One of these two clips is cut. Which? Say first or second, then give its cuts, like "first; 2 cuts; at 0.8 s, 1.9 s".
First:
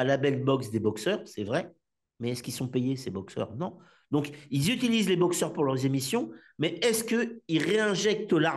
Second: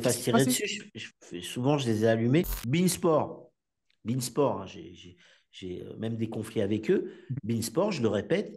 second; 1 cut; at 2.6 s